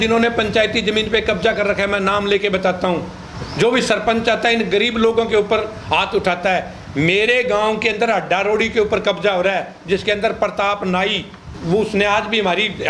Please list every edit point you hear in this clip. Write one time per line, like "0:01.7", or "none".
0:11.5